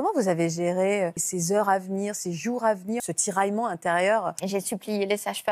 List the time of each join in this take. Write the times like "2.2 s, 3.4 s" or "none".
1.3 s, 3.0 s, 4.4 s